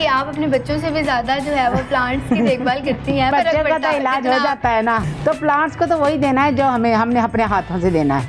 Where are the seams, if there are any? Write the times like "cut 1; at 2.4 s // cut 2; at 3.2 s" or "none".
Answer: cut 1; at 3.3 s // cut 2; at 5.0 s